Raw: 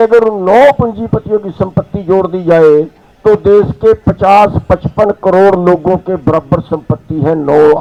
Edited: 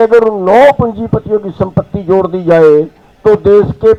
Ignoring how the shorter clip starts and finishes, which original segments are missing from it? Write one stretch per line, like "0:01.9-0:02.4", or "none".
none

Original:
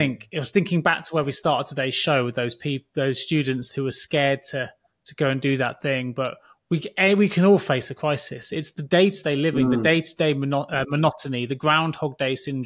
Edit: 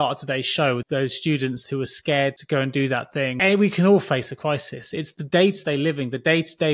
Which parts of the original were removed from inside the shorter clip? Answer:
0:02.3-0:02.9
0:04.4-0:05.1
0:06.0-0:06.9

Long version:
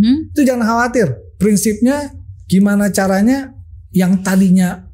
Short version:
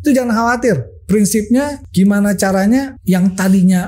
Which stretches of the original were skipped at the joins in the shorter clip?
0:02.1-0:02.4
0:03.5-0:03.8

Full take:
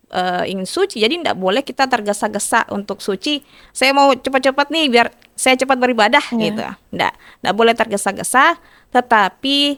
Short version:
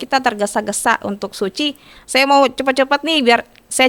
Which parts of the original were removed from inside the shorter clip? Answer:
none

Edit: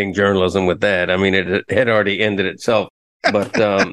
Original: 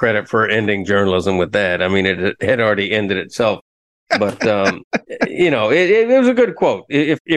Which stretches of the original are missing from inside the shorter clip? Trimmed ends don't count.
0:03.7-0:03.9

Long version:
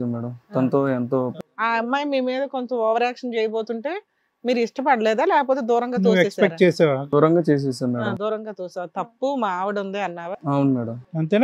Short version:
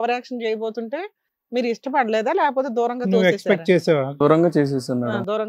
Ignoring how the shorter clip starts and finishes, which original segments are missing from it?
none

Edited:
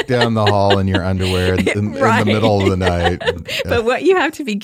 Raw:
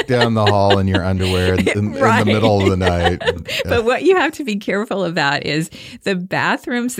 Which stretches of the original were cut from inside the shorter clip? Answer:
none

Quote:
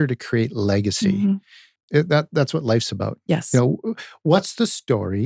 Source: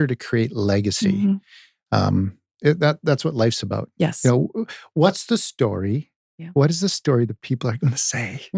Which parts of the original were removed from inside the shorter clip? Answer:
0:01.7-0:02.4

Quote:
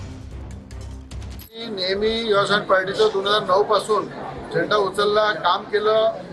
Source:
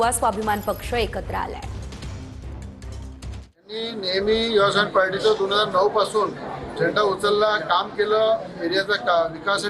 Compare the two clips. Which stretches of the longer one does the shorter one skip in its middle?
0:03.7-0:03.8

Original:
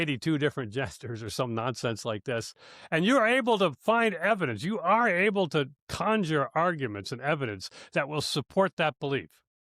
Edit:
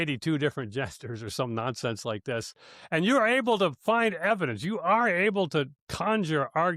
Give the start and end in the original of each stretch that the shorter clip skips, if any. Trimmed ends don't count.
none

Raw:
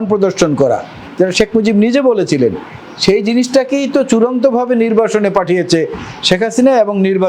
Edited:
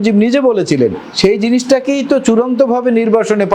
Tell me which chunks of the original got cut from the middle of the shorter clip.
0:02.7-0:02.9

